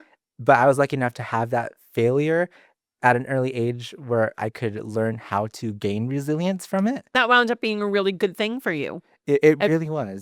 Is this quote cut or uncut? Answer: cut